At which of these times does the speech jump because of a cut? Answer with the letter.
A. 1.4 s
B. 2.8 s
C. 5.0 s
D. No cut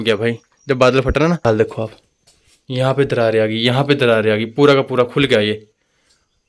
A